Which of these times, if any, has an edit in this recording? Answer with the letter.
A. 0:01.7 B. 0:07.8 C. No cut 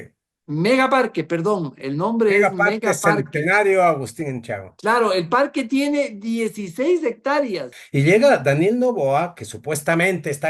B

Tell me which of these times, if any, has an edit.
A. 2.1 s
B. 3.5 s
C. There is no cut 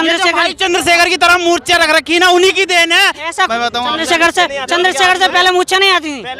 B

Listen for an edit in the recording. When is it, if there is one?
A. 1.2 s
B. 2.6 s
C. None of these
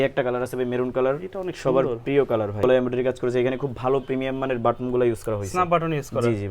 B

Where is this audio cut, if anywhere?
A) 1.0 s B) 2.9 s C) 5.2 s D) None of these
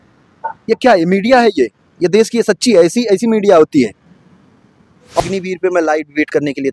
C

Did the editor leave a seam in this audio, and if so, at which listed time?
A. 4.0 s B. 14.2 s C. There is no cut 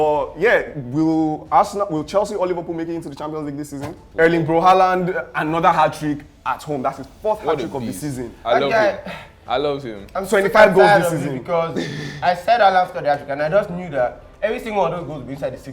A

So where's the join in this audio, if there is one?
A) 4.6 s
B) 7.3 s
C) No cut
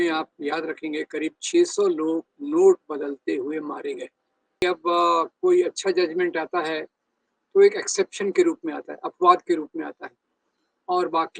A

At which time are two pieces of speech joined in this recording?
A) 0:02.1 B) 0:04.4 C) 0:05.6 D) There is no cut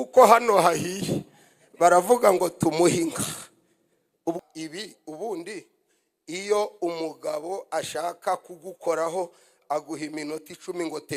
B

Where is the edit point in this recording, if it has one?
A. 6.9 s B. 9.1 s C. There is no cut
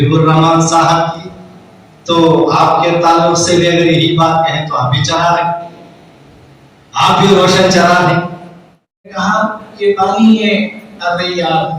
B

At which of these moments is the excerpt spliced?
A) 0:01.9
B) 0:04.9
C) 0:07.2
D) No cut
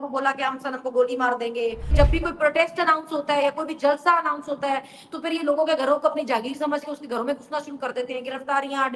A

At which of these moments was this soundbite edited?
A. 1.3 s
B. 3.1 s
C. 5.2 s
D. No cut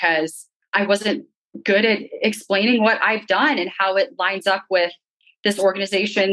D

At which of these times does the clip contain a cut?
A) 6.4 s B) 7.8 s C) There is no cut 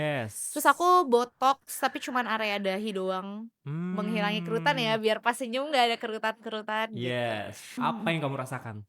B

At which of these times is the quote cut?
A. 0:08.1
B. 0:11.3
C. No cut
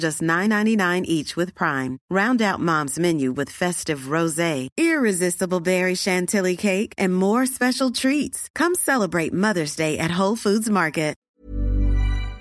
B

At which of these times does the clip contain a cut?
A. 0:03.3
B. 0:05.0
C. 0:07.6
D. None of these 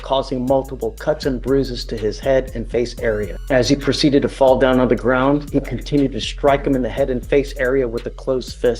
A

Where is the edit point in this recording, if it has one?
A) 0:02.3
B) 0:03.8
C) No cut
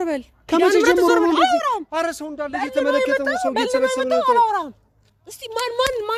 C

